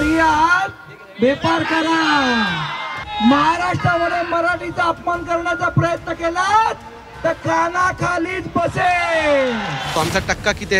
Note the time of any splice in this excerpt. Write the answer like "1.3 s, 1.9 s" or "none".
3.1 s, 10.0 s